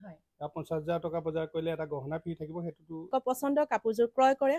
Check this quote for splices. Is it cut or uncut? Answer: cut